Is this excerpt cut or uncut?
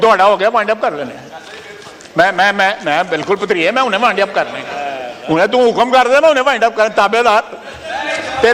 uncut